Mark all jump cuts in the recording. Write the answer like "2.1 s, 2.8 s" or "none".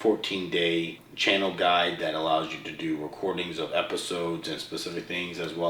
1.0 s

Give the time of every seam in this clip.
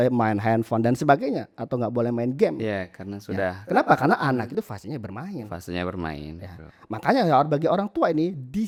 none

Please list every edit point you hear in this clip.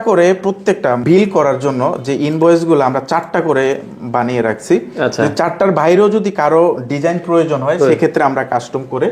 1.0 s

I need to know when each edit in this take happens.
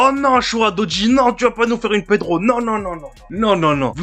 none

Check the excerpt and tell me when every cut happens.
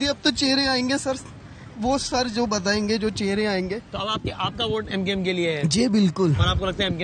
none

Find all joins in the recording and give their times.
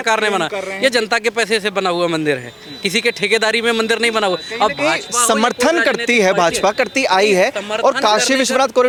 none

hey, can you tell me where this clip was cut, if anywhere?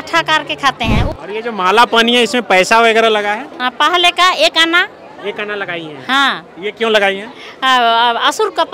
1.1 s

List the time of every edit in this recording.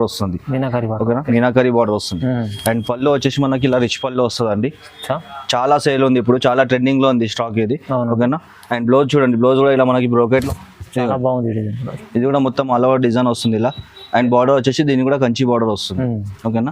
10.4 s

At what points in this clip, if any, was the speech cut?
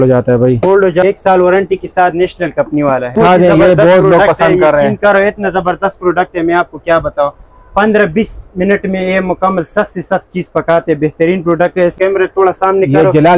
1.0 s, 3.2 s, 11.9 s

